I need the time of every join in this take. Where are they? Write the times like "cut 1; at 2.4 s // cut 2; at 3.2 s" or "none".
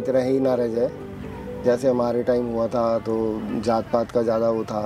none

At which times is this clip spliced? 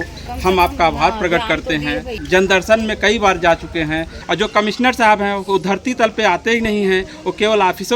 cut 1; at 2.1 s // cut 2; at 4.2 s

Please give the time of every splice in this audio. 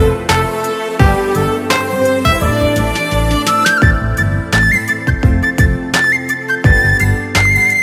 none

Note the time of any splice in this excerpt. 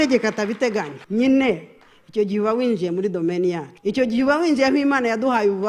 cut 1; at 1.0 s // cut 2; at 3.7 s

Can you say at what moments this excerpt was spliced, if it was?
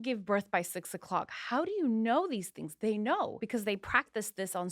cut 1; at 3.4 s

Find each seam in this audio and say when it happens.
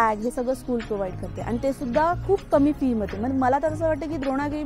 none

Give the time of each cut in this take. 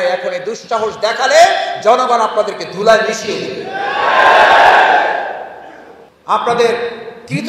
cut 1; at 6.1 s

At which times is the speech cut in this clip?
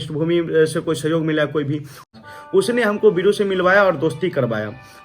cut 1; at 2.0 s

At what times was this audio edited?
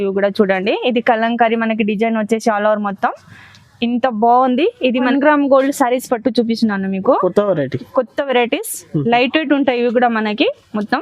cut 1; at 5.1 s

